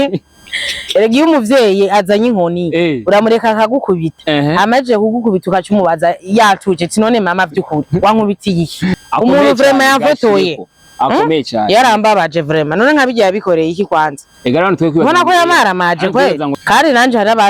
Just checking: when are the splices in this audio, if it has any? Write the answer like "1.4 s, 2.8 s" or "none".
9.0 s, 16.5 s